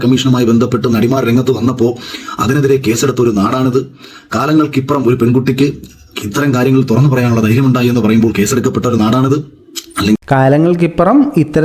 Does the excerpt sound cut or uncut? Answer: uncut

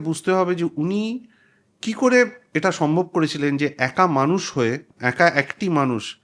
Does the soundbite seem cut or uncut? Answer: uncut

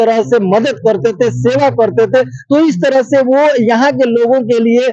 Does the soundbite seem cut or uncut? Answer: uncut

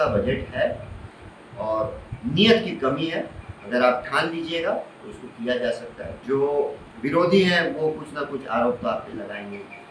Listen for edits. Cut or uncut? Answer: cut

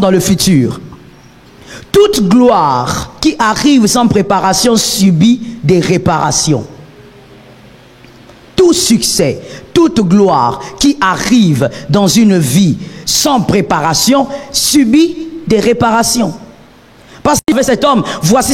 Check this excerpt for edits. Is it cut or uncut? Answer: cut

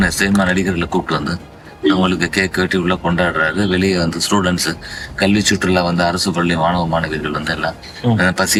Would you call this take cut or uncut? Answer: uncut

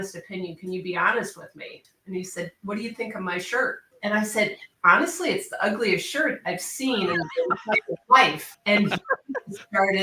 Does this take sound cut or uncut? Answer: cut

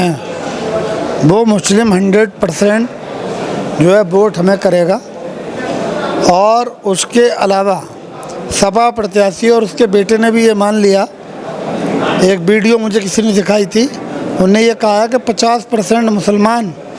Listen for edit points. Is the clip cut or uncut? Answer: uncut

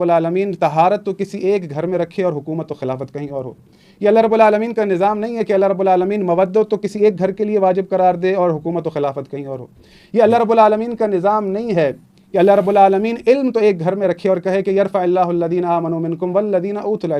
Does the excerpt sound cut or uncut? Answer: uncut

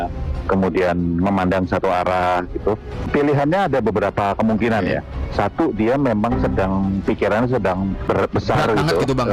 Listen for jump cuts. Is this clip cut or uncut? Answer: cut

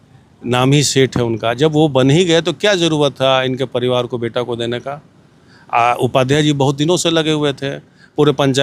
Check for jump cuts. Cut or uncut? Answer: uncut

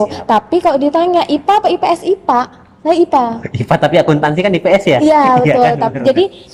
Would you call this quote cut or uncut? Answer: uncut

